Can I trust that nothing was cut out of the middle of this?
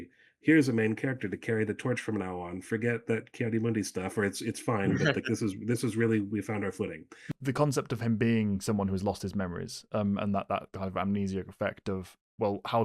no; 1 cut; at 7.3 s

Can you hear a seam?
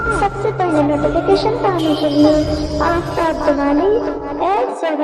no; 0 cuts

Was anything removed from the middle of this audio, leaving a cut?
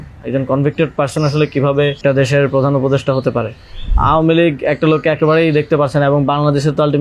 yes; 2 cuts; at 2.0 s, 3.9 s

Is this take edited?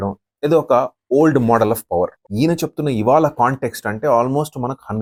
no; 0 cuts

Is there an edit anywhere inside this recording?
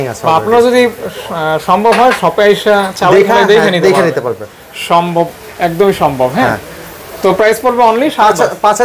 no; 0 cuts

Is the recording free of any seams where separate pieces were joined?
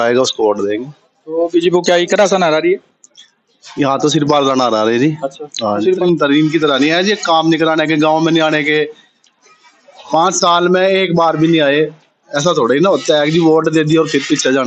no; 1 cut; at 6.0 s

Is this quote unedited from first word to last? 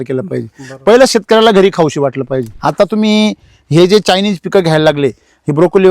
no; 1 cut; at 2.5 s

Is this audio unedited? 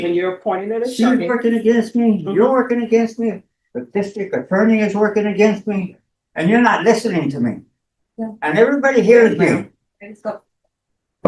yes; 0 cuts

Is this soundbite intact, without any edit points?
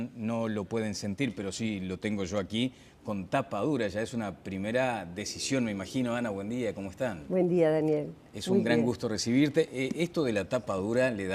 no; 1 cut; at 10.4 s

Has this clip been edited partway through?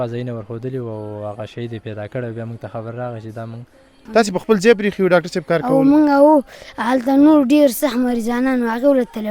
yes; 1 cut; at 4.0 s

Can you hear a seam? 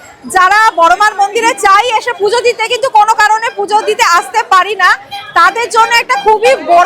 no; 0 cuts

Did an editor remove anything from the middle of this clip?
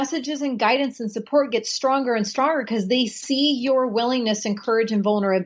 no; 0 cuts

